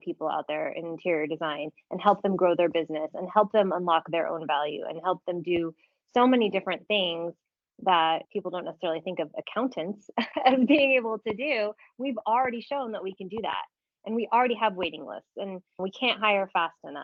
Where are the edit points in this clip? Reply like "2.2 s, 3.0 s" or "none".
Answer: none